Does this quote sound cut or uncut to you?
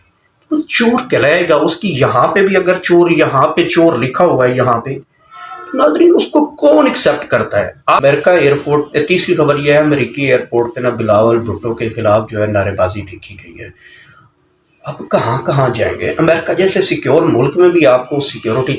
cut